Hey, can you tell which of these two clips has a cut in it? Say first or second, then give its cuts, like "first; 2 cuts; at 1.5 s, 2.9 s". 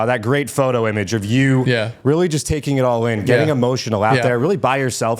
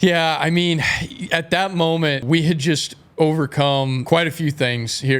second; 2 cuts; at 2.2 s, 4.0 s